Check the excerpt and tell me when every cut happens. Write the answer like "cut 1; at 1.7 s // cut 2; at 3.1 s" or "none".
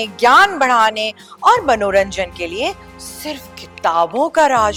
none